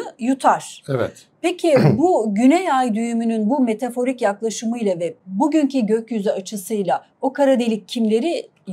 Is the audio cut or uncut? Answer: uncut